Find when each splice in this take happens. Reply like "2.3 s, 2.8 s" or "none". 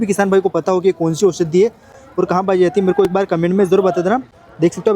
none